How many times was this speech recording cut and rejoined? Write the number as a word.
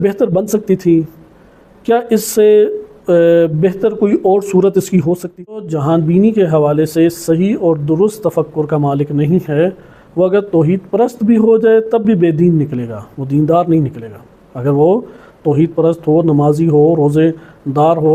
one